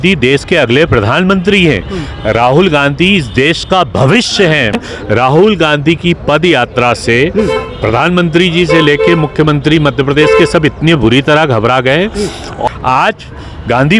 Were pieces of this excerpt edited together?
yes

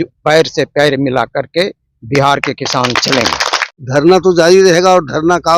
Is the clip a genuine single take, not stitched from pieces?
no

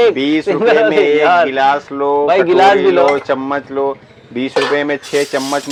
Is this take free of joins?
yes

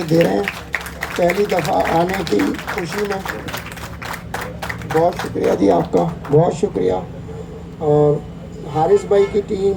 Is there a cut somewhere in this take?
no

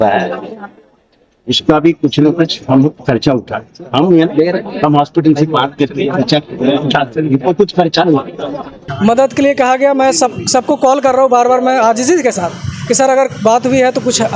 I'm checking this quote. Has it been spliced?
yes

